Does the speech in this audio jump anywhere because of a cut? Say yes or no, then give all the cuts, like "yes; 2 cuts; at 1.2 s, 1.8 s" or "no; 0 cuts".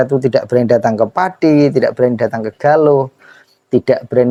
no; 0 cuts